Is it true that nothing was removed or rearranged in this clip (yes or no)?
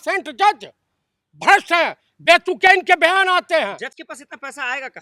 yes